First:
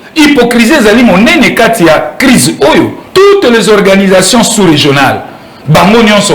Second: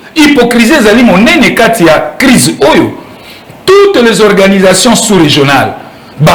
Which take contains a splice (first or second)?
first